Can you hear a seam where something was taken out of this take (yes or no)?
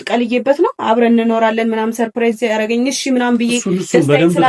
no